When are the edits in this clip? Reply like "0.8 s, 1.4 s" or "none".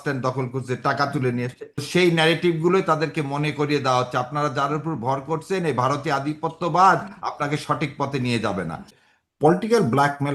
1.9 s, 8.9 s